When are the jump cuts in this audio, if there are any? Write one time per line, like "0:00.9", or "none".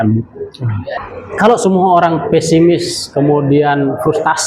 0:00.9